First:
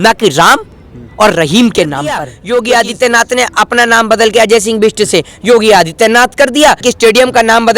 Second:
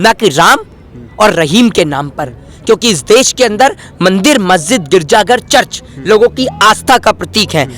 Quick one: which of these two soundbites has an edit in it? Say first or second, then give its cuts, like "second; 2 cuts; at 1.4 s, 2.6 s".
first; 2 cuts; at 2.3 s, 6.8 s